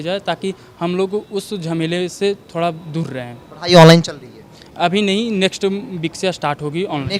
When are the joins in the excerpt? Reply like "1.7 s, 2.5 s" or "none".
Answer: none

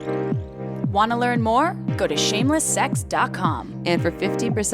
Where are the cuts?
0.9 s

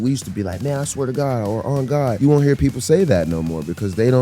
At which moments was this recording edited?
2.2 s

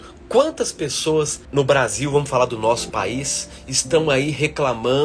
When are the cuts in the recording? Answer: 1.4 s

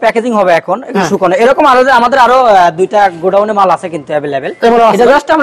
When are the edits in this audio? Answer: none

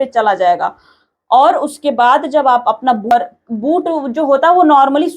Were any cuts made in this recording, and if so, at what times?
3.1 s

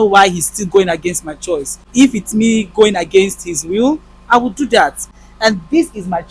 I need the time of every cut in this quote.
1.8 s, 5.1 s

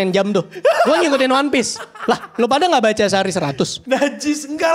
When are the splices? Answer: 3.8 s

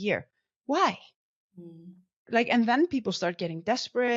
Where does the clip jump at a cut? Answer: 2.3 s

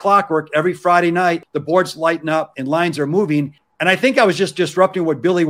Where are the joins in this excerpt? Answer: 1.4 s, 2.5 s, 3.6 s

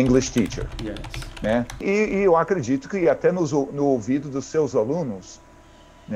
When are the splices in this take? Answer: 1.8 s

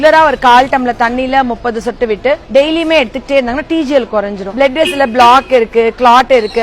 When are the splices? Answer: 2.4 s, 4.4 s

